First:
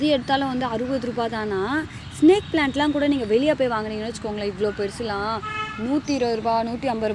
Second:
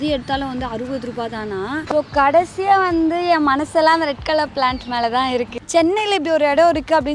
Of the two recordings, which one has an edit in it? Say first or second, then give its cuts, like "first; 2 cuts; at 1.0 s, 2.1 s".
second; 2 cuts; at 1.9 s, 5.5 s